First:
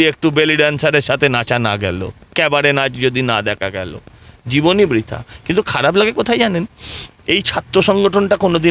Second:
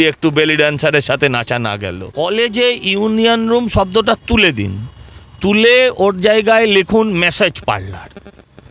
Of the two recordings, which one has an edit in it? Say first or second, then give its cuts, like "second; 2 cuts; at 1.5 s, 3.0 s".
second; 1 cut; at 2.0 s